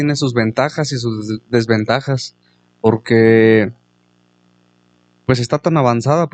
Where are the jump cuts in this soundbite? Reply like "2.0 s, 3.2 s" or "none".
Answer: none